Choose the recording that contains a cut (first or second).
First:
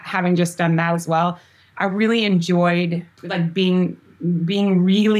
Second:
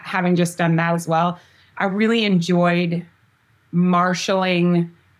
first